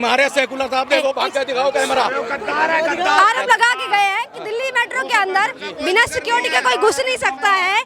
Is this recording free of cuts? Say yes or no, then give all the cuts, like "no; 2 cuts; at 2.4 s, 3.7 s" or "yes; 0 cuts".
yes; 0 cuts